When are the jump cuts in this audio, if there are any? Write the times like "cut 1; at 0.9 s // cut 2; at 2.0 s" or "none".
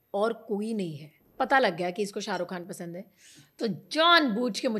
cut 1; at 1.3 s